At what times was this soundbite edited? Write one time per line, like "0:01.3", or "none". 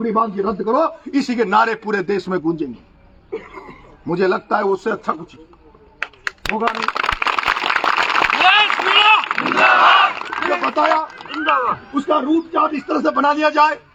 none